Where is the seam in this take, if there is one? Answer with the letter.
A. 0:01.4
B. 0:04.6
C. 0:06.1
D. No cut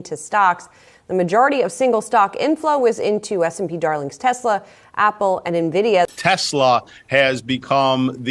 C